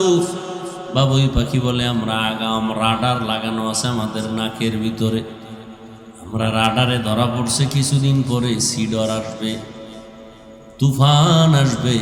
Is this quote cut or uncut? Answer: uncut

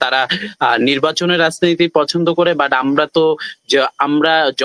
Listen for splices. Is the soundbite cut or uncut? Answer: uncut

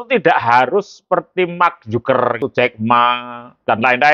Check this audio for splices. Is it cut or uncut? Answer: cut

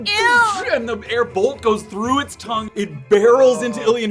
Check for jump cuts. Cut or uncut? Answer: cut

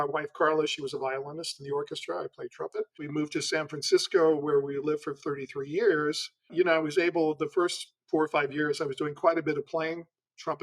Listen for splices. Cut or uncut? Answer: cut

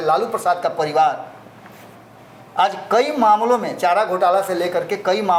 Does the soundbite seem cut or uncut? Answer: uncut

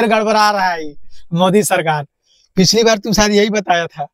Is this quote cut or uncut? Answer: uncut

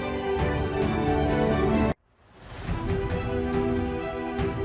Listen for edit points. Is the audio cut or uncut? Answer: uncut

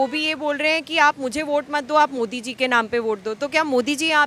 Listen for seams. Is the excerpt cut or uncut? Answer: uncut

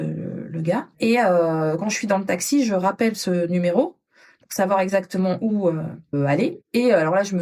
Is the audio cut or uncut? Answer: cut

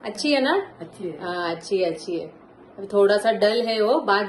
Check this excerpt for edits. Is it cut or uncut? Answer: uncut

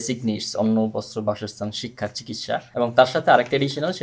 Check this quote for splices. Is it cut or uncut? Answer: cut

